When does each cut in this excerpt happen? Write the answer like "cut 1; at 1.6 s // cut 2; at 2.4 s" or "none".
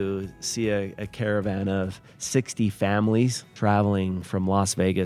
cut 1; at 3.5 s